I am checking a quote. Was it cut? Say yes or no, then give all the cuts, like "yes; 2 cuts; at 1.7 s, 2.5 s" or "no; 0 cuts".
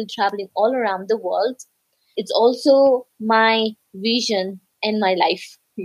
no; 0 cuts